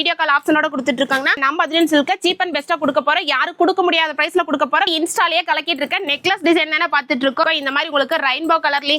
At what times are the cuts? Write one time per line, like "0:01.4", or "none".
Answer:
0:01.3
0:04.9
0:07.6